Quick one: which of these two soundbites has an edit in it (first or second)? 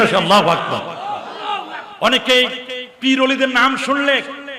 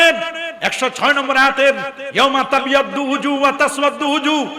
first